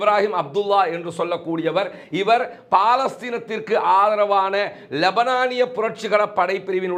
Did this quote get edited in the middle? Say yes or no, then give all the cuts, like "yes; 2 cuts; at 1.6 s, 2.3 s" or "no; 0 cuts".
no; 0 cuts